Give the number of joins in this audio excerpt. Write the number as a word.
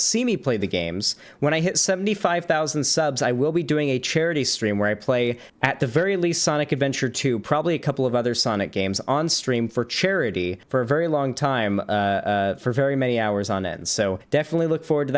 three